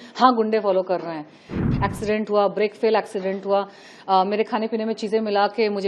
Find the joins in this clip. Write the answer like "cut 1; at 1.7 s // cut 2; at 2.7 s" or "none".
cut 1; at 1.5 s